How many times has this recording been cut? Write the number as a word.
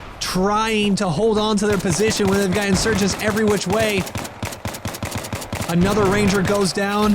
one